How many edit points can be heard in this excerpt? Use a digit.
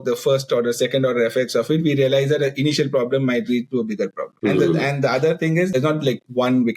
2